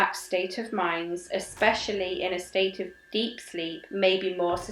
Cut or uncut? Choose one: uncut